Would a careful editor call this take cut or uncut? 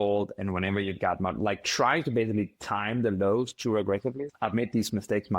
cut